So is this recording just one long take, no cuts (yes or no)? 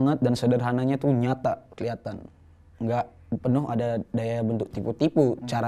yes